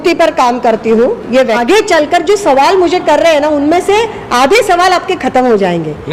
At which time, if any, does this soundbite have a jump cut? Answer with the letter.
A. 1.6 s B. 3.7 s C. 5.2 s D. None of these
A